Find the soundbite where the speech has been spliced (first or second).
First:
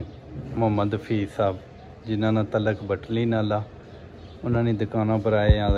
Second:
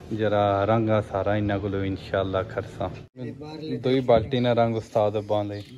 second